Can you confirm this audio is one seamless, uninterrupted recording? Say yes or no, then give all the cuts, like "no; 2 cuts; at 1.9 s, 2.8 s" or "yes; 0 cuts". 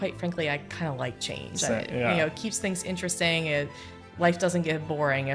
yes; 0 cuts